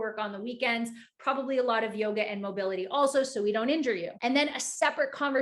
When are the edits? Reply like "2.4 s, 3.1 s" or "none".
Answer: 4.1 s